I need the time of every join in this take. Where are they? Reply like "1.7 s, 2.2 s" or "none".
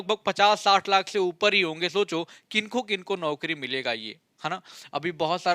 none

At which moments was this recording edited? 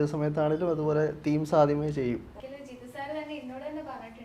2.3 s

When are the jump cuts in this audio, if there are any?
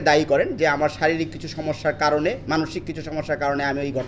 none

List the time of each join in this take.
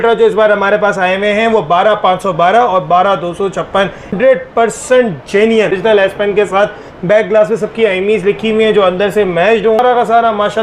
4.1 s, 5.7 s, 9.8 s

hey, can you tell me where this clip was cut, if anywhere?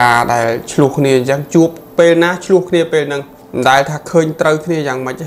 3.3 s

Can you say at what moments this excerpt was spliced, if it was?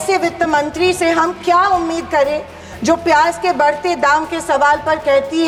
none

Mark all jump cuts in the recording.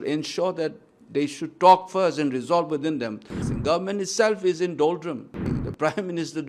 3.4 s, 5.5 s

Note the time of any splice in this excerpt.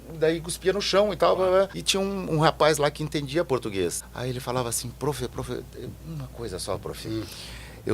1.8 s, 4.1 s

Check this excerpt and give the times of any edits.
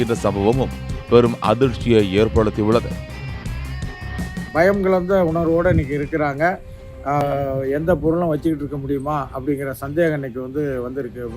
7.2 s

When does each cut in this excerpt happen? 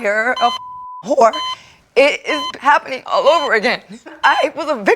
2.5 s

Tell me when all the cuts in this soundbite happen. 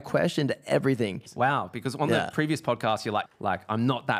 1.2 s, 3.3 s

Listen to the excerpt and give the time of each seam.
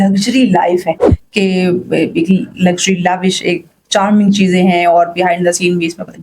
1.0 s

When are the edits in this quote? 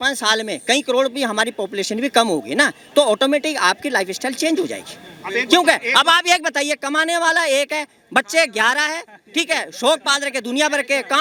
none

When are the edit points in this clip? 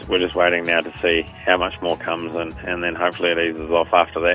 none

